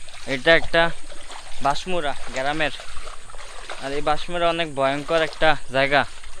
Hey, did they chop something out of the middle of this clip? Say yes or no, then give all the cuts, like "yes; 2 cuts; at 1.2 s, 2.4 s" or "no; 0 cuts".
no; 0 cuts